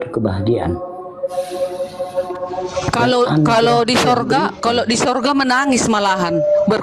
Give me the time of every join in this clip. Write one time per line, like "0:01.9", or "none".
none